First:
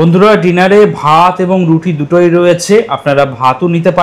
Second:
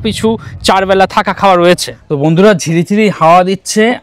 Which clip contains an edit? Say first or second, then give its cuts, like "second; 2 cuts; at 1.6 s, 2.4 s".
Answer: second; 1 cut; at 1.9 s